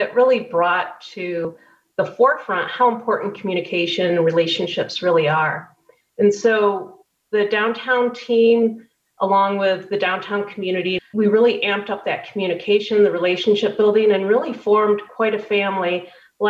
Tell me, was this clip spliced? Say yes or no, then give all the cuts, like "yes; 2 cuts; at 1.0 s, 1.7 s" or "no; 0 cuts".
yes; 1 cut; at 11.0 s